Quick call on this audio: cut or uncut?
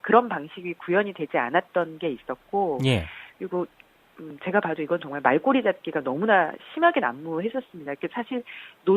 cut